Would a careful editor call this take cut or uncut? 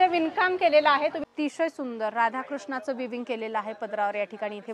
cut